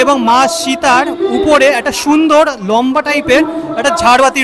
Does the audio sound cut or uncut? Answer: uncut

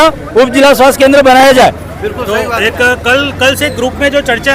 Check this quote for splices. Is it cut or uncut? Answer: uncut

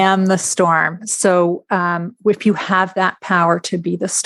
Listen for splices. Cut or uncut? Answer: uncut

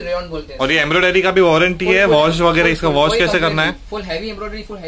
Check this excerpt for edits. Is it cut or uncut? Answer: uncut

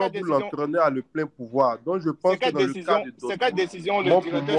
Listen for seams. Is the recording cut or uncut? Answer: uncut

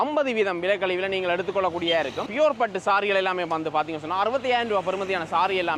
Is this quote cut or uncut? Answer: uncut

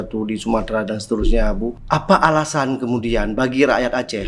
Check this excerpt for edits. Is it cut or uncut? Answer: cut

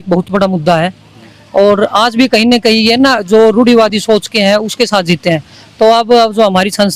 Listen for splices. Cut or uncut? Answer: uncut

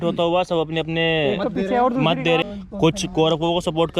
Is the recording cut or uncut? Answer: cut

